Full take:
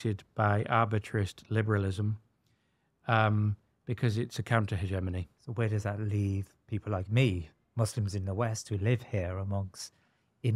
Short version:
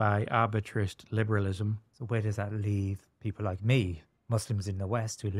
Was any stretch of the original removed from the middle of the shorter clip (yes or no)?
yes